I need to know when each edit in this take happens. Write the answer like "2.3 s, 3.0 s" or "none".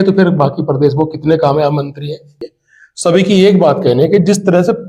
2.4 s